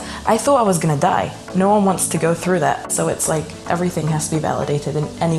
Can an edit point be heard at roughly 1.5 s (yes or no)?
yes